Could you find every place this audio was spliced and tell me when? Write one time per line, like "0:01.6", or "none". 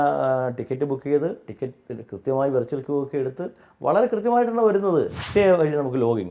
0:05.2